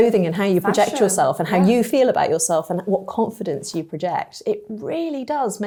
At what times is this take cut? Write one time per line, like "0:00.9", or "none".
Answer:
none